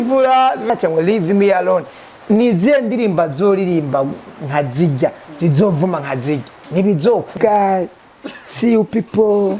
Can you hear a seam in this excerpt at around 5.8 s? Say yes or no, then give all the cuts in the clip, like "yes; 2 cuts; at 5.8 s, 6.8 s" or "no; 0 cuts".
no; 2 cuts; at 0.7 s, 7.3 s